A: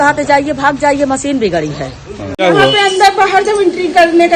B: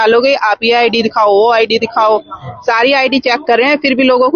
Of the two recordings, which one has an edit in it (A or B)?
A